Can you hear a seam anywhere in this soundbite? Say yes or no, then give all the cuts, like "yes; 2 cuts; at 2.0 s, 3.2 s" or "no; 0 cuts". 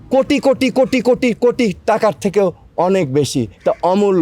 no; 0 cuts